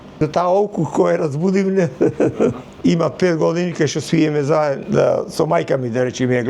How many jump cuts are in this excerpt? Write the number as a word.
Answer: one